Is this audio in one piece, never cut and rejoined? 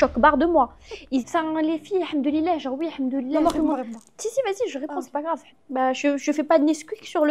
no; 2 cuts; at 1.2 s, 5.5 s

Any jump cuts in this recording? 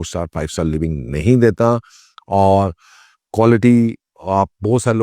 no; 0 cuts

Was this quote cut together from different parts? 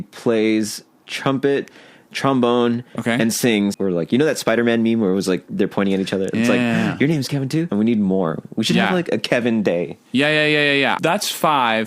yes; 3 cuts; at 3.8 s, 7.7 s, 11.0 s

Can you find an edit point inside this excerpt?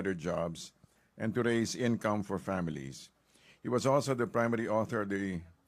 yes; 1 cut; at 2.2 s

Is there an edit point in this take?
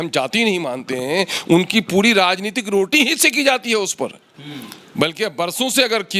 no; 0 cuts

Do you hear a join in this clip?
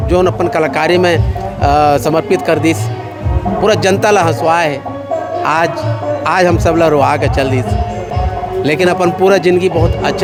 no; 0 cuts

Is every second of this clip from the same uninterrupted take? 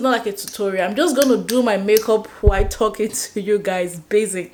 yes; 0 cuts

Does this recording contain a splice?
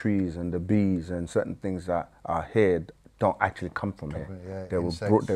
no; 0 cuts

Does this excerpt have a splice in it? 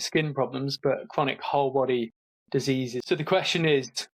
yes; 1 cut; at 3.0 s

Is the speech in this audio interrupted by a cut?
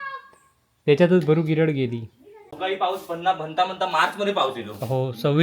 yes; 1 cut; at 2.6 s

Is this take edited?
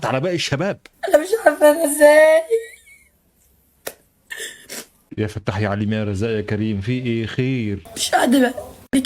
yes; 2 cuts; at 0.8 s, 7.8 s

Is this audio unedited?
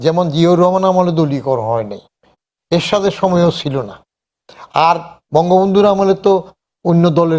yes; 0 cuts

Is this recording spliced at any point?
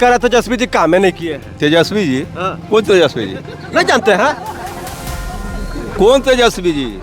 no; 0 cuts

